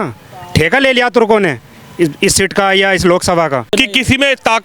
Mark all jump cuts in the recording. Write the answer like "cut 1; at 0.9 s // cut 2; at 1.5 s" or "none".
cut 1; at 3.7 s